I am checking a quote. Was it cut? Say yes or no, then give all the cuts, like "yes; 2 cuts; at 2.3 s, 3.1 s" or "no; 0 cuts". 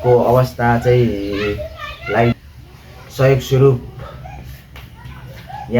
yes; 1 cut; at 2.5 s